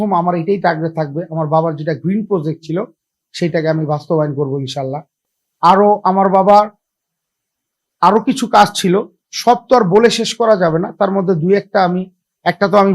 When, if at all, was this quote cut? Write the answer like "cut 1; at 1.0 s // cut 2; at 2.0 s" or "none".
none